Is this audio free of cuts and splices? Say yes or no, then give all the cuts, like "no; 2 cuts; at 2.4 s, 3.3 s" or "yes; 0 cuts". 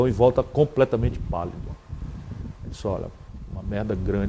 yes; 0 cuts